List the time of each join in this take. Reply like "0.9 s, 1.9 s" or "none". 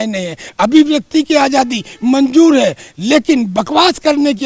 none

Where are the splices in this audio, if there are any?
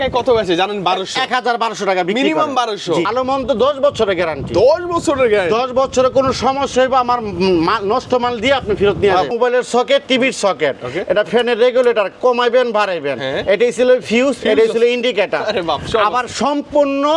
3.1 s, 9.3 s

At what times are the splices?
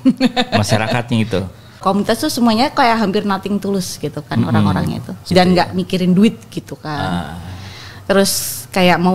1.8 s, 5.3 s

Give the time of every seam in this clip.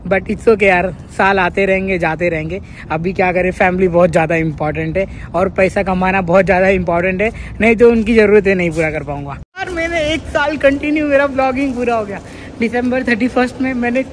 9.7 s

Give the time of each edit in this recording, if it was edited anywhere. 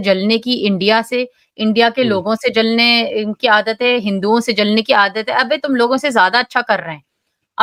none

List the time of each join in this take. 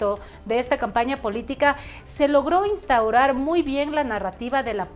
none

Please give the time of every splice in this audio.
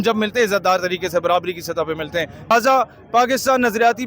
2.5 s

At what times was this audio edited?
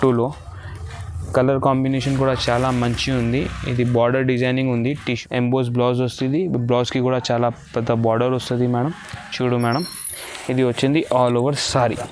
5.1 s

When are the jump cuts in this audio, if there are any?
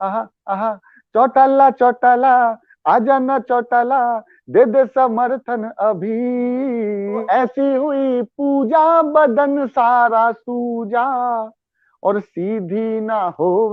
7.2 s

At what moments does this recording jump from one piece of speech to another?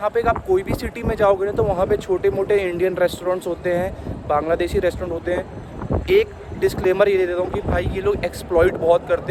none

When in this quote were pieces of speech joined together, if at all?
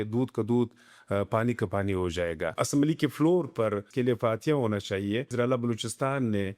2.6 s, 3.9 s, 5.3 s

